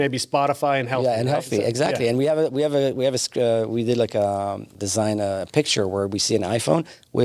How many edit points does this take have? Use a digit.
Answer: 1